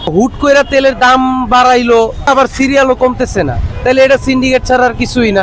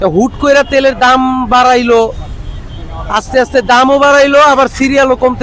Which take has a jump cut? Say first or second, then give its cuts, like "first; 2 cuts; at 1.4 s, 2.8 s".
first; 2 cuts; at 2.3 s, 3.6 s